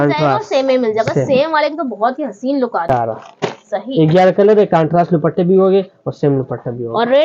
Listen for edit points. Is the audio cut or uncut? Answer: cut